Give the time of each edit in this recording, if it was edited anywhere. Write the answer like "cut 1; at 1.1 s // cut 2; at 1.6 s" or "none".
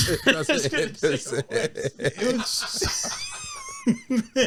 none